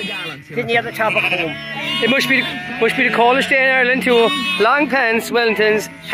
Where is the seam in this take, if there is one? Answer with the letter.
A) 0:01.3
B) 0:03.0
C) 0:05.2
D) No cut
D